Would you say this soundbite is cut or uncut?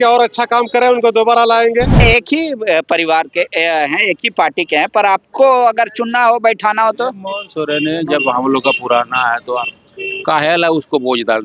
cut